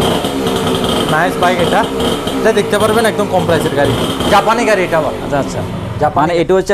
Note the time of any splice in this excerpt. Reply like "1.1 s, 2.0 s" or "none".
none